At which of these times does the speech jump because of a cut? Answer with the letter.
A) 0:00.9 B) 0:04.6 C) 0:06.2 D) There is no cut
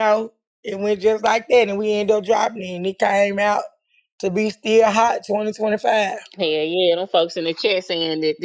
C